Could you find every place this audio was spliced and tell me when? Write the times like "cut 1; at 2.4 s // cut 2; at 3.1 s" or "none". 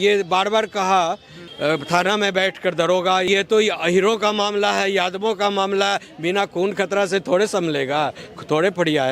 cut 1; at 1.4 s // cut 2; at 3.3 s